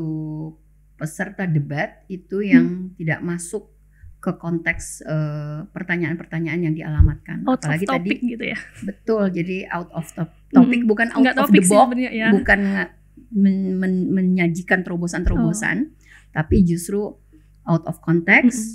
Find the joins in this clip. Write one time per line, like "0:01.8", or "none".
none